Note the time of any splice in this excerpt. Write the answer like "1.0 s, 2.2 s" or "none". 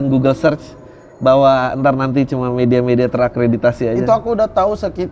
none

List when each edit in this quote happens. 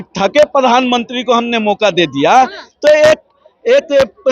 none

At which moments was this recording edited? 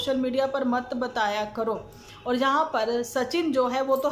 none

